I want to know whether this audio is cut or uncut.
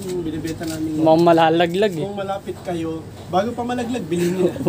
cut